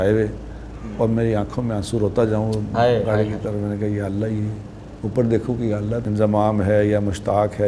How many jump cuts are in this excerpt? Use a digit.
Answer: 1